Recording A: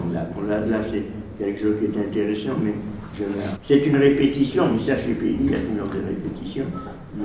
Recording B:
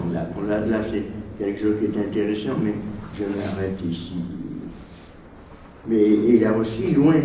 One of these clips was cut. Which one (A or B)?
B